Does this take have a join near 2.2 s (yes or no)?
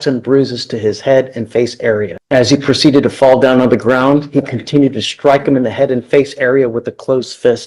yes